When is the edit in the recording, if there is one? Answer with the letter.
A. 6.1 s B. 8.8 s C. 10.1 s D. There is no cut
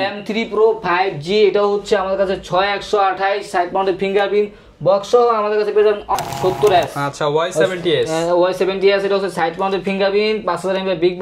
A